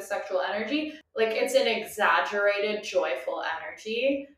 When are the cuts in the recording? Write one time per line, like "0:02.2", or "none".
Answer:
0:01.0